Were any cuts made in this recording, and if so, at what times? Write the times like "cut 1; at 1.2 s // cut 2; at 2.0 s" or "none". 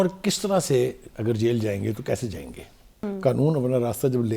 cut 1; at 3.1 s